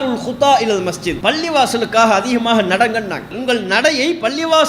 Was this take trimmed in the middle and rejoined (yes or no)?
yes